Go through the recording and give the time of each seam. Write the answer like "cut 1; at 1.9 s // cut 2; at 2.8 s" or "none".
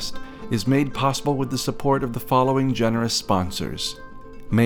none